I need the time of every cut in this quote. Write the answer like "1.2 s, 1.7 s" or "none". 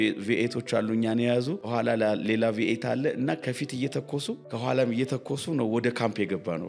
1.6 s, 4.4 s